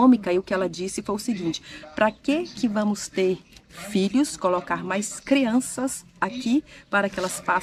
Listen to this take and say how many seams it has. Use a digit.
0